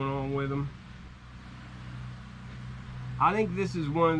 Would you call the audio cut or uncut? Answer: cut